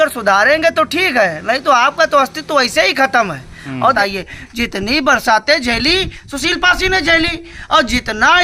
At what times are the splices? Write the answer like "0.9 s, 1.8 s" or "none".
3.9 s